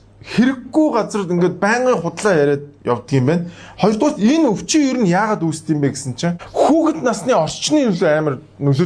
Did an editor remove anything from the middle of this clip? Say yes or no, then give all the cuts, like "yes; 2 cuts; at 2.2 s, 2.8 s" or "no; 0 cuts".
yes; 1 cut; at 6.4 s